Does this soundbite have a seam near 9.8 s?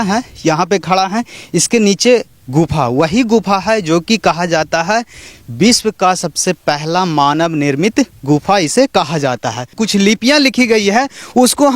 yes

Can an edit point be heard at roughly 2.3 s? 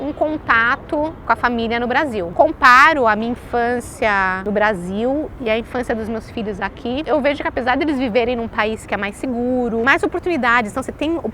yes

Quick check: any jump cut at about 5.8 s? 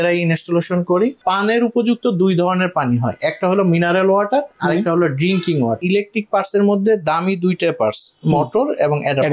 yes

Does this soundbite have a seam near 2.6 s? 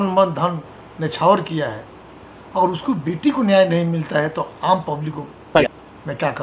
no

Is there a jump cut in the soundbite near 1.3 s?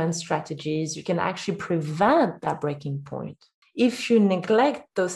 no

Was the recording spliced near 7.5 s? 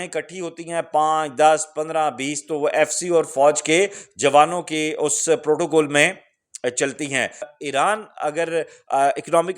yes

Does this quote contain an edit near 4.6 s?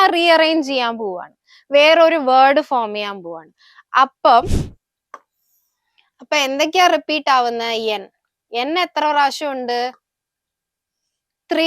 yes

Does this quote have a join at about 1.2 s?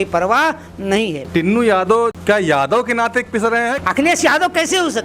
yes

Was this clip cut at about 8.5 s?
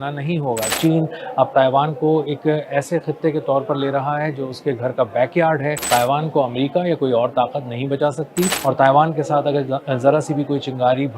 yes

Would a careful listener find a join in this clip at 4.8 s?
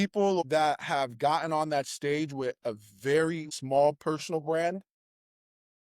no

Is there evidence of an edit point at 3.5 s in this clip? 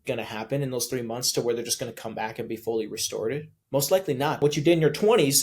yes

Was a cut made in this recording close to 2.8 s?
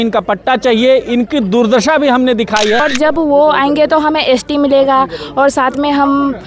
yes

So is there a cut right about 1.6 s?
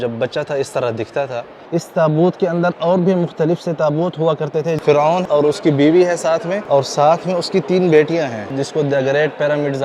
yes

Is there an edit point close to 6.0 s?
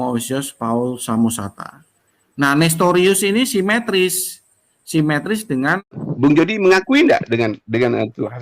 yes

